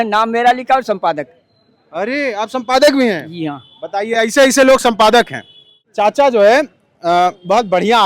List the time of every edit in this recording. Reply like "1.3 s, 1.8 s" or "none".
5.9 s

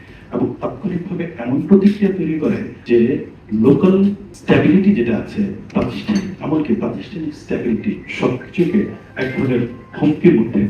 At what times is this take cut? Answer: 2.7 s, 3.3 s, 4.3 s, 9.0 s

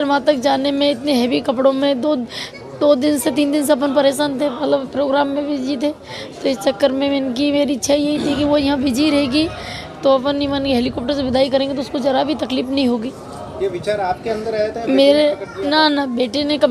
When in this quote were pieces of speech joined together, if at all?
none

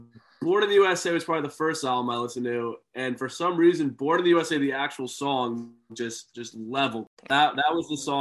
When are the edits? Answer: 7.3 s

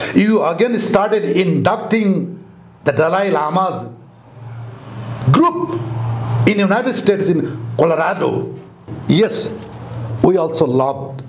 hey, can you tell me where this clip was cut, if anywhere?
9.0 s

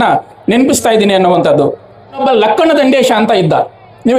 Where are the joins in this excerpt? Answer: 2.2 s

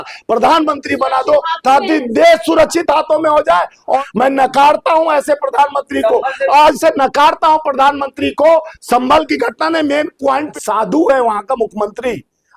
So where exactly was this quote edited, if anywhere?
4.0 s, 10.5 s

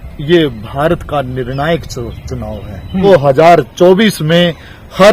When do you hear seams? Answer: 3.0 s

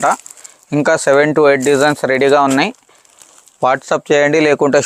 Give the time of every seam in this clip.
none

